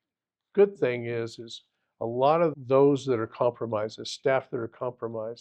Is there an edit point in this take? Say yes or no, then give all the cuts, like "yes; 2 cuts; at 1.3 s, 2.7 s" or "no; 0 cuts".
yes; 1 cut; at 2.5 s